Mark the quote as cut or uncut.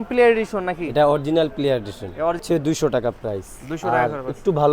cut